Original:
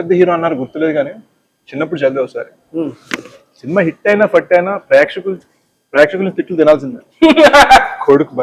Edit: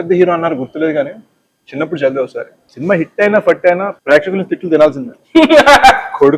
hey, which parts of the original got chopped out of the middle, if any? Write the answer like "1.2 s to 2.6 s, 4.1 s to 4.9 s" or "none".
2.6 s to 3.4 s, 4.8 s to 5.8 s